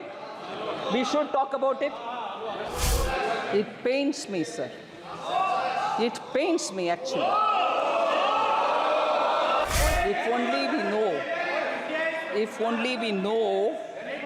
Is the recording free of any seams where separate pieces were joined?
no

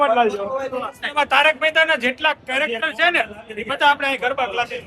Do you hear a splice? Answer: yes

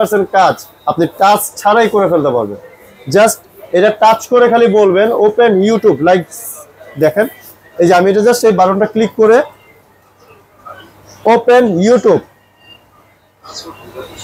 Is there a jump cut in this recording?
no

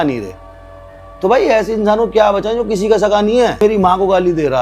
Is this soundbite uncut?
no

